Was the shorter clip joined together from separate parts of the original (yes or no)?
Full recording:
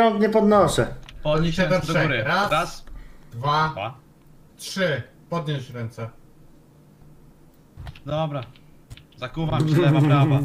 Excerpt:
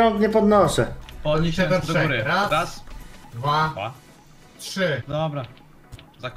yes